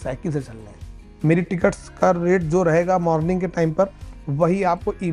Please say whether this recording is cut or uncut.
cut